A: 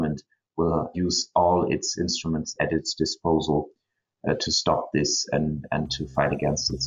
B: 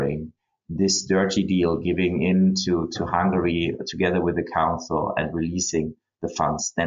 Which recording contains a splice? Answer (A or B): A